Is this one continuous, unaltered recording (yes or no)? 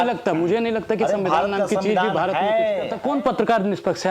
no